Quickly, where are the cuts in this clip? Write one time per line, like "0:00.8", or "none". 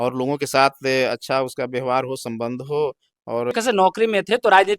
0:03.5